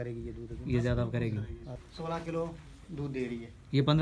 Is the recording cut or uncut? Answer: cut